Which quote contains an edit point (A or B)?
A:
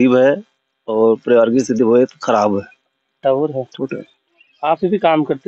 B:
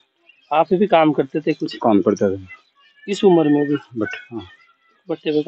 A